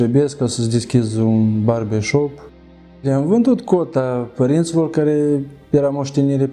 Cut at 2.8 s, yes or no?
yes